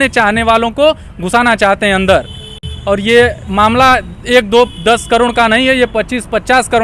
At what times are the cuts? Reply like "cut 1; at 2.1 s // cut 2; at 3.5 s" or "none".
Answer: none

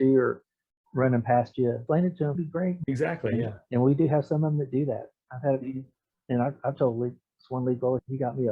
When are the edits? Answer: cut 1; at 1.8 s

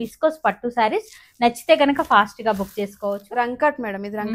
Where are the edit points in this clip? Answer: cut 1; at 3.2 s

